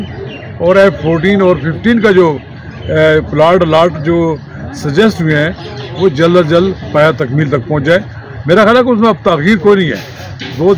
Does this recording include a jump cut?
no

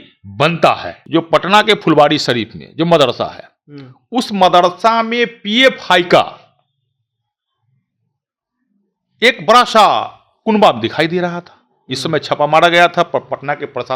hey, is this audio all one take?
no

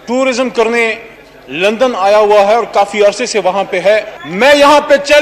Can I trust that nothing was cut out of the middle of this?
no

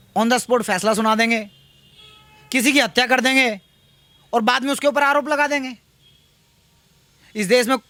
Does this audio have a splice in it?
no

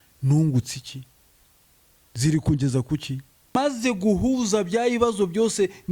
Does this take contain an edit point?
yes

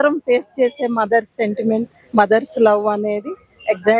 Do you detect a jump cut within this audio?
no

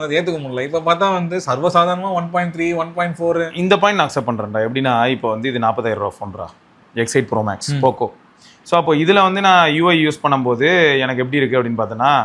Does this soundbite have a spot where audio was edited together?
no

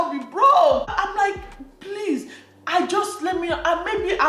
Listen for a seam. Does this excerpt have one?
no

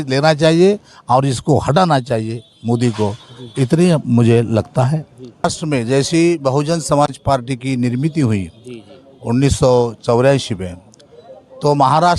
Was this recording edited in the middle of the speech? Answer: yes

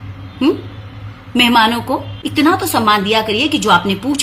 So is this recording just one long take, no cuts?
no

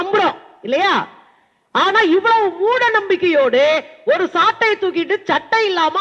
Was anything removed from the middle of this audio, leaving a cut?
no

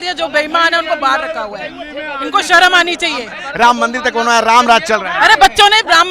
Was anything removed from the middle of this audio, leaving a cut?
yes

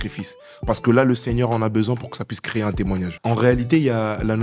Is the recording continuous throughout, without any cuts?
no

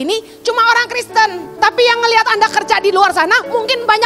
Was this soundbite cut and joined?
yes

